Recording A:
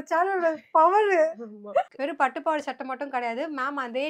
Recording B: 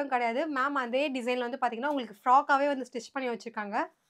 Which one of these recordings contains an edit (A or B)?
A